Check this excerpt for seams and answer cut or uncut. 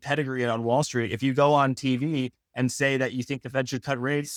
uncut